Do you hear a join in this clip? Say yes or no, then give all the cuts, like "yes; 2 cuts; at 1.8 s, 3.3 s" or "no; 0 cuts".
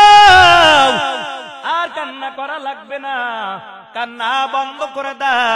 no; 0 cuts